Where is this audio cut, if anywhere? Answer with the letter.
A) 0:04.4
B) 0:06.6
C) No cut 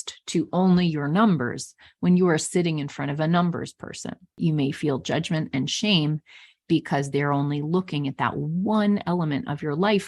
A